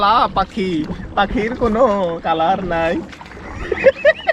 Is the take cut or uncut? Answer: uncut